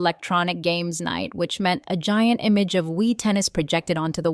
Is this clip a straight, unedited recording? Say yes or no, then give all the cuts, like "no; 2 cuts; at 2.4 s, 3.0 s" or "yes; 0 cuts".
yes; 0 cuts